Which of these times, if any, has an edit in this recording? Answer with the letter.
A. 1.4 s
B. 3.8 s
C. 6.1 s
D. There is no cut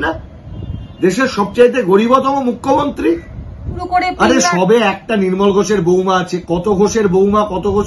B